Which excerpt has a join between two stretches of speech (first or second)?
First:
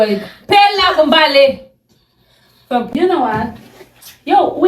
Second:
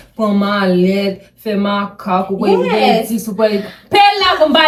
first